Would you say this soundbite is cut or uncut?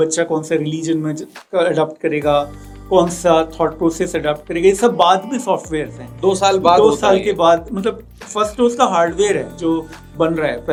uncut